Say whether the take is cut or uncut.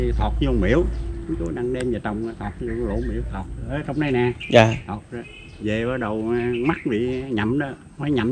uncut